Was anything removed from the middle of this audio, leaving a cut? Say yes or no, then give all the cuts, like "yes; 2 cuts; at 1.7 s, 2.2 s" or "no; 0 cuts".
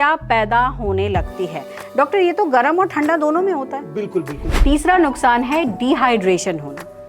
yes; 1 cut; at 4.4 s